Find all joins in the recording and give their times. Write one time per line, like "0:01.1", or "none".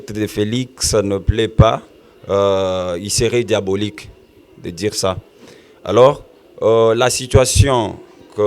none